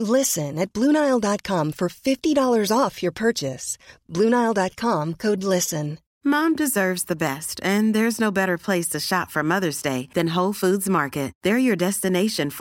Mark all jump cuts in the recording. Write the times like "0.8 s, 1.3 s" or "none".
6.0 s